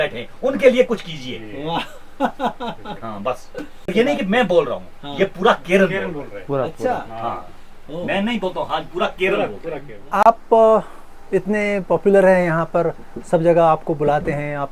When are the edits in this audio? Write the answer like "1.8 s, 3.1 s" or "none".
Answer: 3.9 s, 10.3 s